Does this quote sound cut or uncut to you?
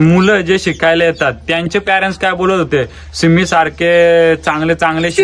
uncut